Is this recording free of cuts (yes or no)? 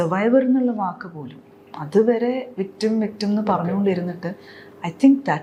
yes